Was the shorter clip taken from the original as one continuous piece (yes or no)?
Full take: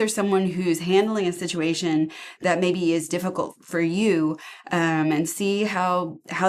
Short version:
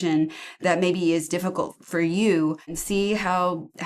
no